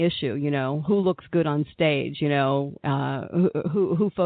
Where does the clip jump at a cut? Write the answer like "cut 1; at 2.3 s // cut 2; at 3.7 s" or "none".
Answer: none